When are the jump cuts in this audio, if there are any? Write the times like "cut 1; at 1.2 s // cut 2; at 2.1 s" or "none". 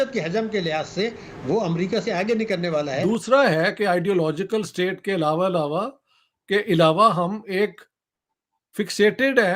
cut 1; at 3.0 s